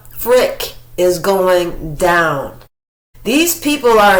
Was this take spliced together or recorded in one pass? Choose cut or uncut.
uncut